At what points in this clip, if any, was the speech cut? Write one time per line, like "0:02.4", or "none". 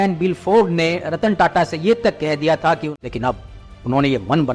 0:02.9